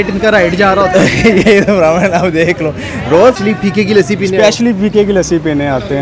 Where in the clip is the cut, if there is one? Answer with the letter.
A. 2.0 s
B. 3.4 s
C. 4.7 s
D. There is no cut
B